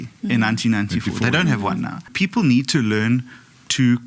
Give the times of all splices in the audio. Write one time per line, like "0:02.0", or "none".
0:02.1